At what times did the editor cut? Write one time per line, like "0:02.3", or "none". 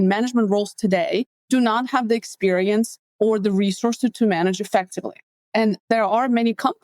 0:01.3
0:03.0
0:05.7